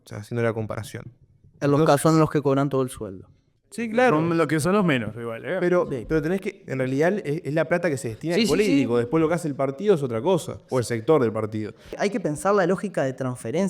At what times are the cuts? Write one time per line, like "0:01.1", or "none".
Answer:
0:11.9

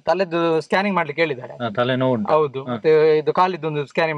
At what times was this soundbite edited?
none

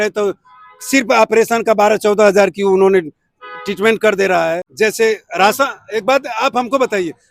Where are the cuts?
0:04.7

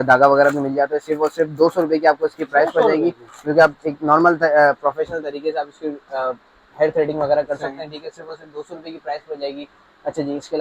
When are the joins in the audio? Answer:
none

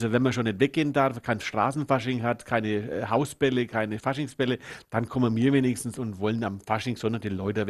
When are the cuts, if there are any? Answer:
none

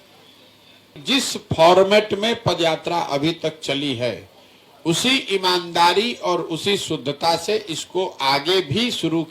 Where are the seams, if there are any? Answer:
0:00.9

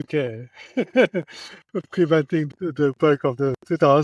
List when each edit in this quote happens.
0:02.5

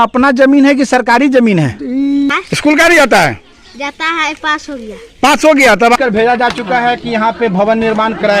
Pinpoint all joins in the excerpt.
0:02.3
0:06.0

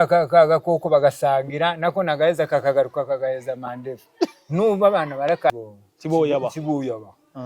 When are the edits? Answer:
0:05.5

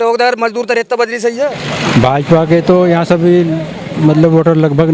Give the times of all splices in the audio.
0:01.6

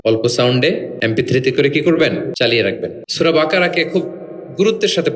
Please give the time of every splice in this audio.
0:00.9
0:02.5

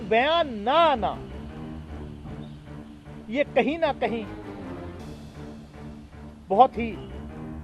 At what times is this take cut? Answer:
0:01.1
0:03.3

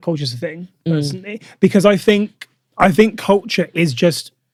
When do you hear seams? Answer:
none

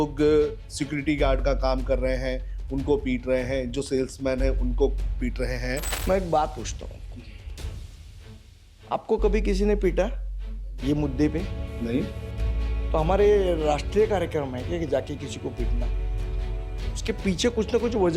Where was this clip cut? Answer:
0:05.9

